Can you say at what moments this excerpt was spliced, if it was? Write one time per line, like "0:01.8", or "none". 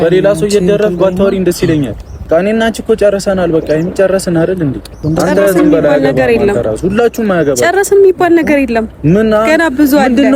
0:02.3
0:04.9